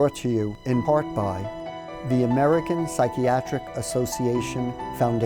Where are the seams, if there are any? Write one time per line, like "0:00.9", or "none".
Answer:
0:01.5